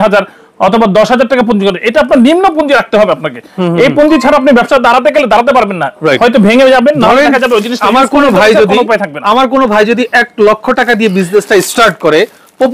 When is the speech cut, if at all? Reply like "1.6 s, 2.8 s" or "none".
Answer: none